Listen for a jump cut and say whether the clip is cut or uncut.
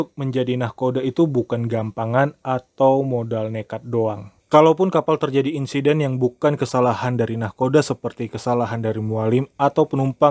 cut